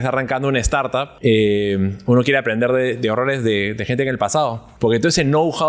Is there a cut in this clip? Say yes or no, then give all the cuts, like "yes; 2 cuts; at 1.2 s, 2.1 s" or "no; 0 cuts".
yes; 2 cuts; at 1.1 s, 4.7 s